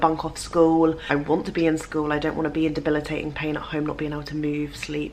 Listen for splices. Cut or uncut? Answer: cut